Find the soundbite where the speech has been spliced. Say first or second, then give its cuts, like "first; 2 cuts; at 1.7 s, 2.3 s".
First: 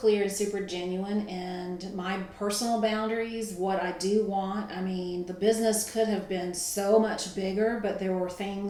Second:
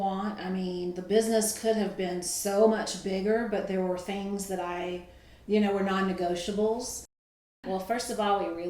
second; 1 cut; at 7.5 s